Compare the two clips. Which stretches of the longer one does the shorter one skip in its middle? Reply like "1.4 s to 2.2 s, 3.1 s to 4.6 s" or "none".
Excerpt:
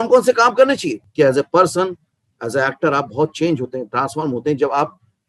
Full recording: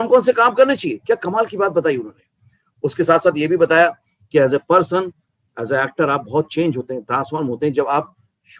0.9 s to 4.1 s